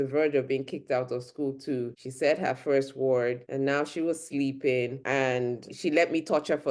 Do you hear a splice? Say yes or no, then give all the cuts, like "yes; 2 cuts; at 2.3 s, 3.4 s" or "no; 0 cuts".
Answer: yes; 3 cuts; at 2.0 s, 3.4 s, 5.5 s